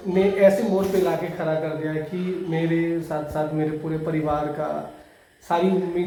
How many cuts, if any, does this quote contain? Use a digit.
0